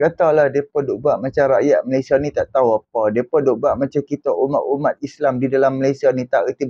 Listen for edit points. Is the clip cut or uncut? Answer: uncut